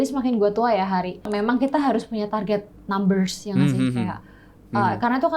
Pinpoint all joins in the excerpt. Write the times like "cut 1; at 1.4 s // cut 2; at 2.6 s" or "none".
cut 1; at 1.3 s